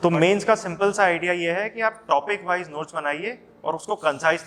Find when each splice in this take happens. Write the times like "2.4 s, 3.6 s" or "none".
none